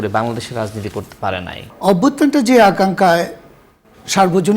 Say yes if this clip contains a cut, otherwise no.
yes